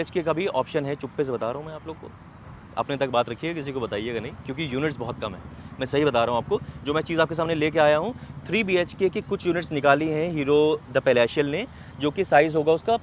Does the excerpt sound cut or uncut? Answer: uncut